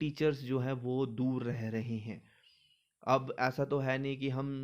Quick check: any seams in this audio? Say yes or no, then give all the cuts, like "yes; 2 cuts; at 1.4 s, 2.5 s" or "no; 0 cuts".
no; 0 cuts